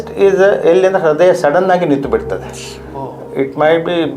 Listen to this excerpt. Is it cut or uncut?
uncut